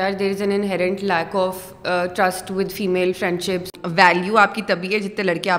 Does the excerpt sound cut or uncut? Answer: cut